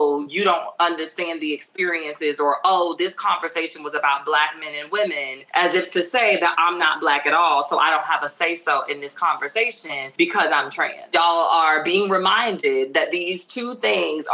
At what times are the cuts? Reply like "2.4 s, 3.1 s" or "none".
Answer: 5.3 s, 10.0 s, 11.1 s